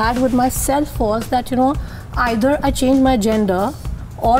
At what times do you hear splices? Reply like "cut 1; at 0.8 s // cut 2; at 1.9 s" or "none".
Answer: none